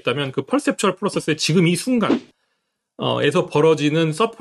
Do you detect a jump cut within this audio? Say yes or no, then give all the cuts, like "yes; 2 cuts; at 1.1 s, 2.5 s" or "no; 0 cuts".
no; 0 cuts